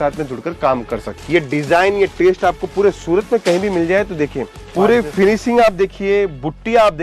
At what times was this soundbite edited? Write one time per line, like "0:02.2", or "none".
0:01.1
0:04.7